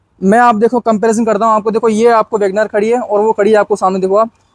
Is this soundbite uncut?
yes; 0 cuts

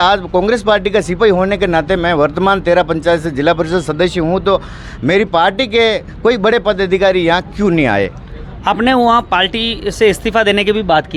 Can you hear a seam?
no; 0 cuts

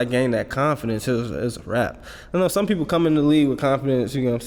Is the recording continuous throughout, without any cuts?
yes; 0 cuts

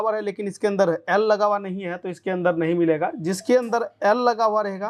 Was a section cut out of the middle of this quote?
no; 0 cuts

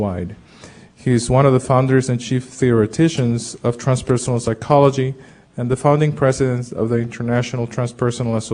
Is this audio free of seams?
yes; 0 cuts

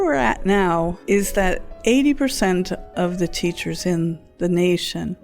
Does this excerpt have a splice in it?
yes; 2 cuts; at 1.3 s, 4.2 s

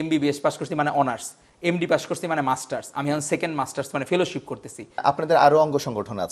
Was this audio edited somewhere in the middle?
yes; 1 cut; at 5.0 s

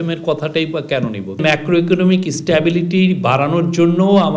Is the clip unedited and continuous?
no; 1 cut; at 1.3 s

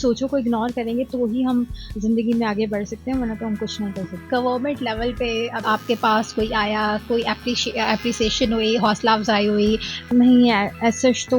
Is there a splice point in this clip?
no; 0 cuts

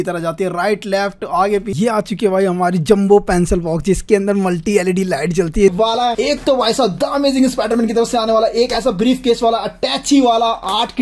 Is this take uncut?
no; 2 cuts; at 1.7 s, 5.7 s

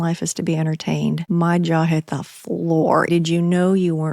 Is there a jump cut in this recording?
yes; 2 cuts; at 1.2 s, 3.1 s

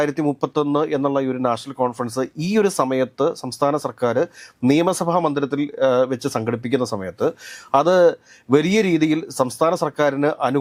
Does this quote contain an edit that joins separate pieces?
no; 0 cuts

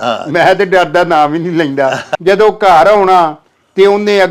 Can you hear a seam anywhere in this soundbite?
yes; 1 cut; at 2.1 s

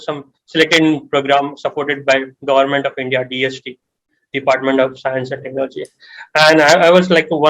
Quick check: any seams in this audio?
no; 0 cuts

